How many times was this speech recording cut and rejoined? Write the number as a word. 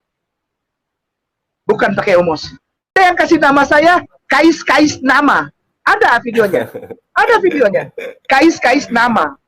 one